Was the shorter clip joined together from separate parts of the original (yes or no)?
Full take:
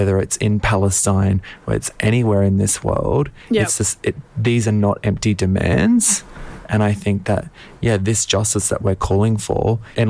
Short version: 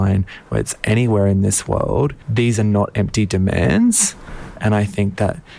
yes